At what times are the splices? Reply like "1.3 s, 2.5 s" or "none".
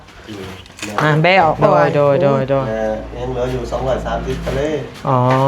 1.7 s